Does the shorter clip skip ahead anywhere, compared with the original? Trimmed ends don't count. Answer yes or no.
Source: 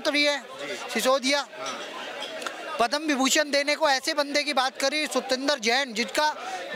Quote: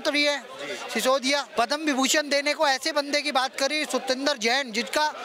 yes